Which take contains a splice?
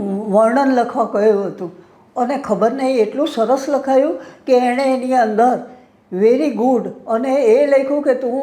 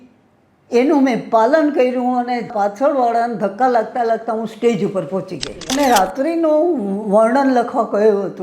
second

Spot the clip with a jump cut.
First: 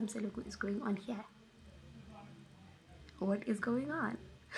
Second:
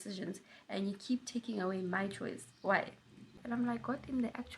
second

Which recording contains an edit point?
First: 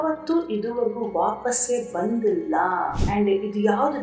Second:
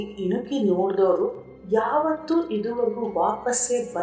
first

